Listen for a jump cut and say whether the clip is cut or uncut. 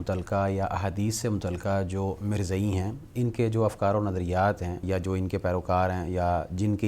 cut